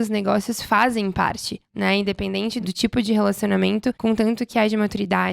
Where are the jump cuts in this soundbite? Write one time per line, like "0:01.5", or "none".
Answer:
0:02.6
0:04.0